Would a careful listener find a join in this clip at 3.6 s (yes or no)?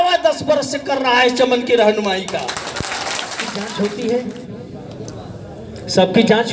yes